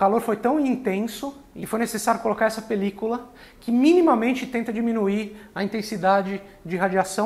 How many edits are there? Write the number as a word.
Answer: one